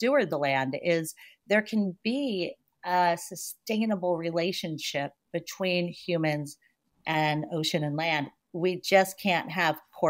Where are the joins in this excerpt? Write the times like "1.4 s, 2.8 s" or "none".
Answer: none